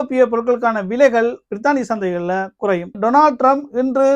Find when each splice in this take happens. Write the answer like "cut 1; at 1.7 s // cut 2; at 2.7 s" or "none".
cut 1; at 2.9 s